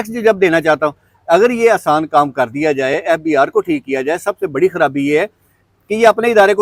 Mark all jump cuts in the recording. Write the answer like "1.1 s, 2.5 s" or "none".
none